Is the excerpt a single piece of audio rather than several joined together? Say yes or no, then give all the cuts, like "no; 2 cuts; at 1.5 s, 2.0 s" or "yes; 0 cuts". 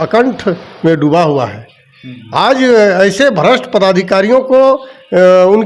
yes; 0 cuts